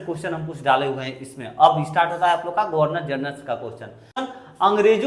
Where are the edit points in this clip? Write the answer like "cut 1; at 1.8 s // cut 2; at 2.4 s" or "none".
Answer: cut 1; at 4.2 s